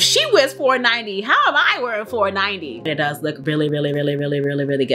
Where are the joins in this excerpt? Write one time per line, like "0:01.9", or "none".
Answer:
0:02.9